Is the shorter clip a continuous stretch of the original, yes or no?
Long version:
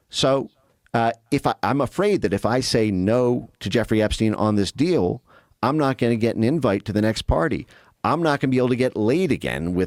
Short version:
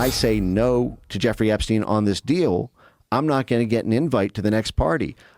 yes